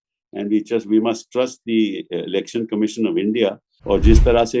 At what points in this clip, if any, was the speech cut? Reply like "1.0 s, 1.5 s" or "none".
3.7 s